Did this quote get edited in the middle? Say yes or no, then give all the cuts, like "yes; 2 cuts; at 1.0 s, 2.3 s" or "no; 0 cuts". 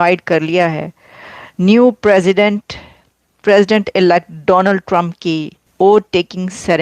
yes; 1 cut; at 5.6 s